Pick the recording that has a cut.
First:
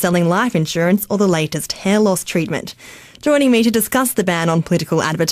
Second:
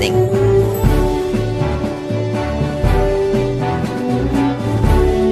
first; 1 cut; at 4.2 s

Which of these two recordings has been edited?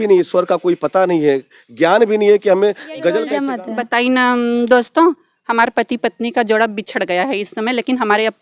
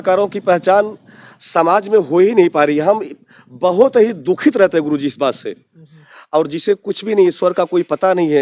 first; 1 cut; at 3.3 s

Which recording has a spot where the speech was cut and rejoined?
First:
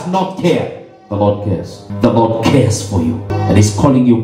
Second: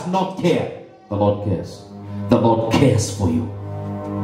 first; 2 cuts; at 1.8 s, 3.3 s

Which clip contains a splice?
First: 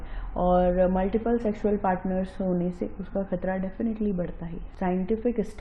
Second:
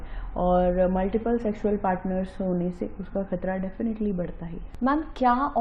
first; 1 cut; at 4.6 s

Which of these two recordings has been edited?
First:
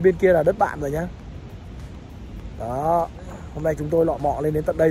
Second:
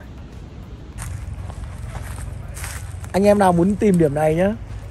second; 1 cut; at 1.0 s

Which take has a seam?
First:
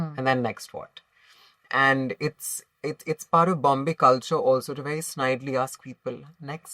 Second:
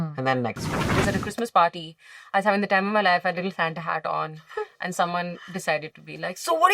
second; 1 cut; at 1.0 s

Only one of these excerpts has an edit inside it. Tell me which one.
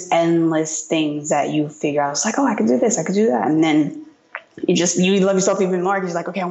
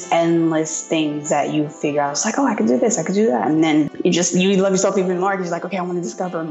second; 1 cut; at 3.9 s

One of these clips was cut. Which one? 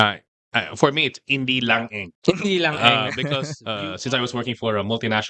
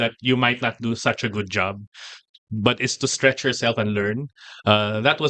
first; 1 cut; at 3.6 s

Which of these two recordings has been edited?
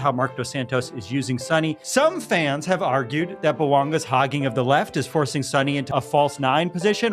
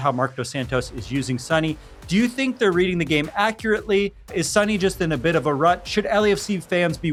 first; 2 cuts; at 1.9 s, 5.9 s

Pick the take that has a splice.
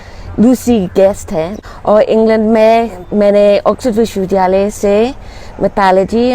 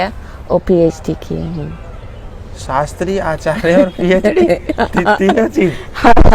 first; 1 cut; at 1.6 s

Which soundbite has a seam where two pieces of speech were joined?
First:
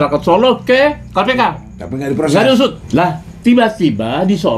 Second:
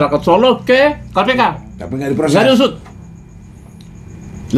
first; 1 cut; at 2.8 s

